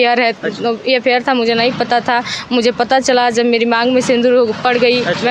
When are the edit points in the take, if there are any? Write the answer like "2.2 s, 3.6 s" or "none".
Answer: none